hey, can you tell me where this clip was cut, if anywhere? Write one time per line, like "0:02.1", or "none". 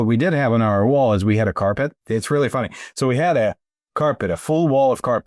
none